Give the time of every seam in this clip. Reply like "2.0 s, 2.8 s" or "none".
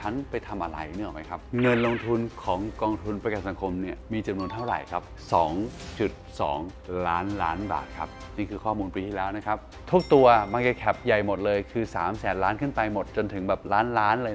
1.4 s, 5.1 s, 9.8 s